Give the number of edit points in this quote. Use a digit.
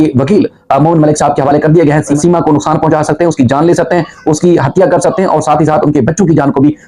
1